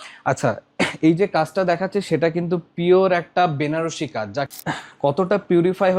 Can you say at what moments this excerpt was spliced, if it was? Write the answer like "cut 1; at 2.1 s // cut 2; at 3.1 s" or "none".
cut 1; at 4.5 s